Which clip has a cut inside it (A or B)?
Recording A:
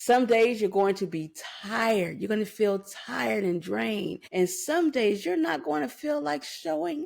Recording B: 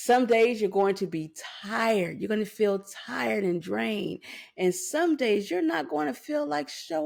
A